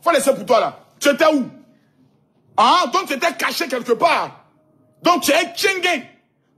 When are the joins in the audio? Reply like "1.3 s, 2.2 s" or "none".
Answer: 3.5 s